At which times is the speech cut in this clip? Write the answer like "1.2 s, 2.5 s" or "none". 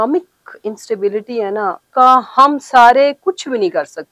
1.8 s